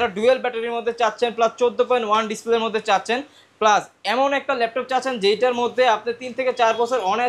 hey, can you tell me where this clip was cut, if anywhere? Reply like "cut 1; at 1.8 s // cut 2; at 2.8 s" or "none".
none